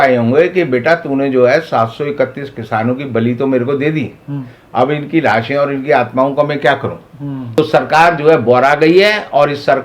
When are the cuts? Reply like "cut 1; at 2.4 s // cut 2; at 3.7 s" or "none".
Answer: cut 1; at 7.4 s

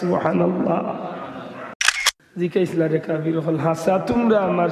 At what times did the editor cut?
cut 1; at 1.8 s

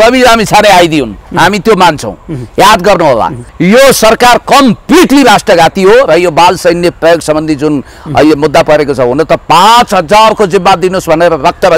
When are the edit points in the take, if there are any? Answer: cut 1; at 3.5 s

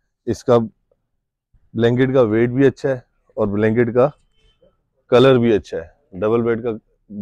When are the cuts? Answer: none

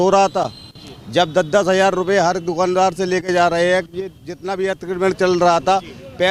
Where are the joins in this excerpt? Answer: none

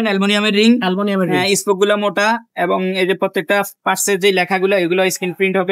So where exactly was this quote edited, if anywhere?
none

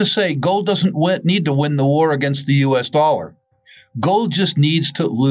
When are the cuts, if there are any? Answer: none

